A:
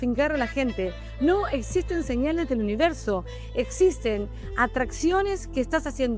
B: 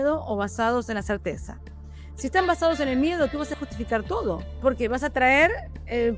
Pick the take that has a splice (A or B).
B